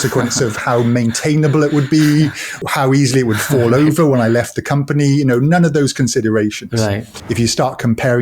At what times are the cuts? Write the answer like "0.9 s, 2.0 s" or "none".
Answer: 2.6 s, 7.1 s